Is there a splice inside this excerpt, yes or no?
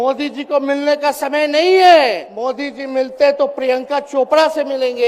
yes